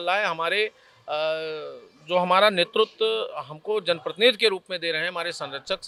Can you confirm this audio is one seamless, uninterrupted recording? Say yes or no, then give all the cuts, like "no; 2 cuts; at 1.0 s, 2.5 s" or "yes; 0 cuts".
yes; 0 cuts